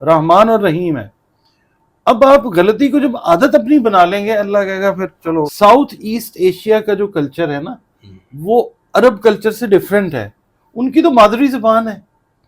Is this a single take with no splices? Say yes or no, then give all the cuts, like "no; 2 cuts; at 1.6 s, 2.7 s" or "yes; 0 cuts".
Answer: no; 1 cut; at 5.5 s